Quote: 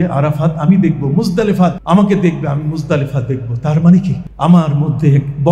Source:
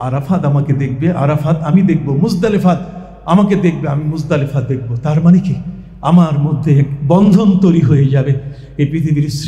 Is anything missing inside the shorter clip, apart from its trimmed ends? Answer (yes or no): yes